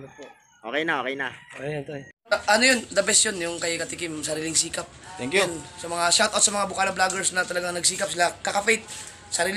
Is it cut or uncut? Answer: cut